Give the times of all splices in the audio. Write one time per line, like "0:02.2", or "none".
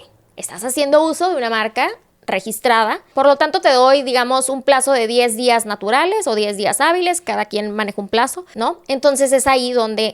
0:03.1
0:08.4